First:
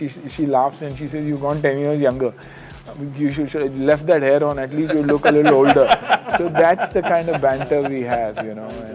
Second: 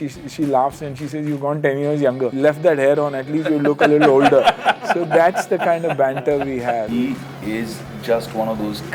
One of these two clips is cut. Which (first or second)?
second